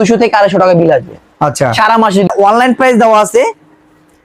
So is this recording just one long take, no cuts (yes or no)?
no